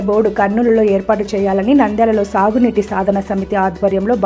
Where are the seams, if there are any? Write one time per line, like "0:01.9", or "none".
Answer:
none